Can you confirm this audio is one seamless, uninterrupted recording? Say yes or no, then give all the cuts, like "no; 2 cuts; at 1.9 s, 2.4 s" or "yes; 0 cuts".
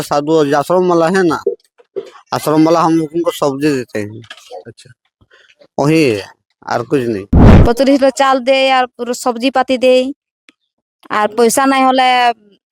no; 1 cut; at 7.4 s